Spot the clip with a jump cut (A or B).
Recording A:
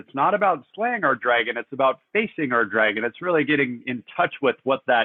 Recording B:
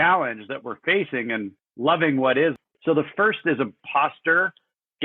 B